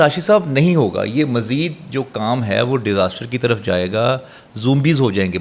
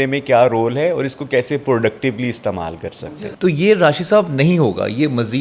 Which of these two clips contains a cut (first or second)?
second